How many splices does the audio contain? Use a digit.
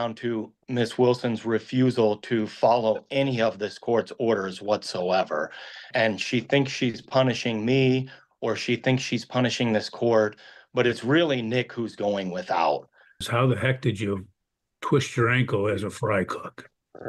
2